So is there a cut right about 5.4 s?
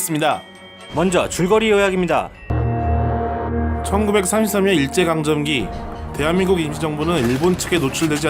yes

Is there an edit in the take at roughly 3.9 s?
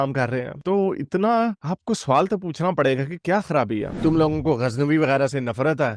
yes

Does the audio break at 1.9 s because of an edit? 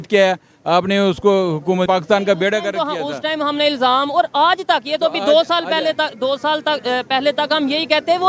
yes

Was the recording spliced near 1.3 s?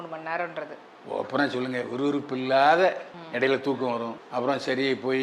no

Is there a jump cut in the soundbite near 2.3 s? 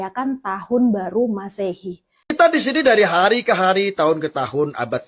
yes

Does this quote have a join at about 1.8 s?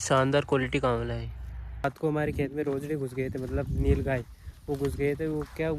yes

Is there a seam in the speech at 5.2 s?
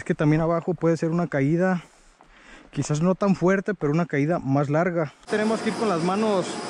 yes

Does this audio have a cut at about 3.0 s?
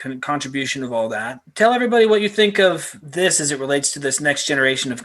yes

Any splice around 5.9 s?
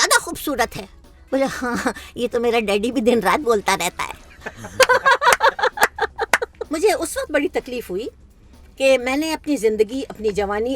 no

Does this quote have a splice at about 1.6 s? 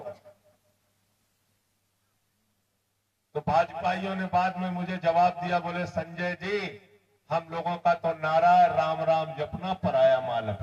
no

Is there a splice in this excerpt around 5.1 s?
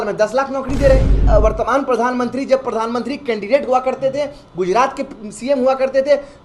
no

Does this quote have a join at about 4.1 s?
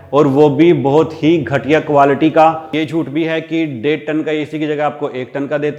no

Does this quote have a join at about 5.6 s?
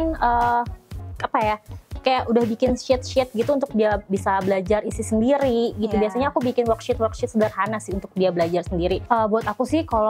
no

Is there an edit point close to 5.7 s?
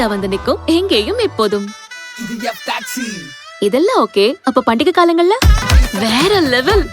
yes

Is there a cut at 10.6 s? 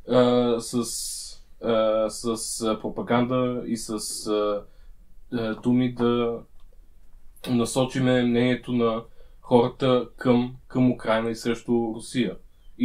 yes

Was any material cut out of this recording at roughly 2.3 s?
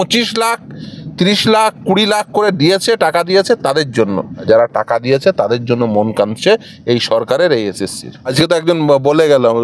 no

